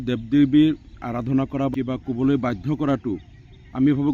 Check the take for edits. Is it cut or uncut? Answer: cut